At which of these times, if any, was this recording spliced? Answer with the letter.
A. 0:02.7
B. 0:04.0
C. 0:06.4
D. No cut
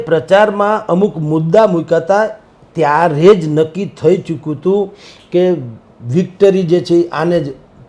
D